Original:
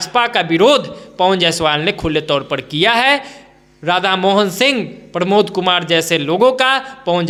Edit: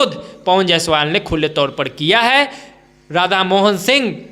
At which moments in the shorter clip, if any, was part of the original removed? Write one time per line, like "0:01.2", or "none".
none